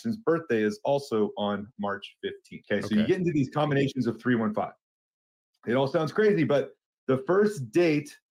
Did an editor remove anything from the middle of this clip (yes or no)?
yes